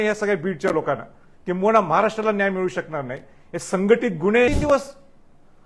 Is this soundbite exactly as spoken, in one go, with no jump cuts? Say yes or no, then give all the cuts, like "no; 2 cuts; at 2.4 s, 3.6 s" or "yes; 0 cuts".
no; 1 cut; at 4.5 s